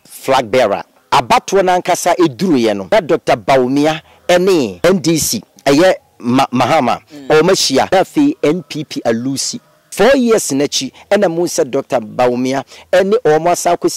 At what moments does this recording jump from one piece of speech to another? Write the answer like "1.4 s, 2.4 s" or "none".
0.9 s, 2.9 s, 5.0 s, 7.9 s, 9.8 s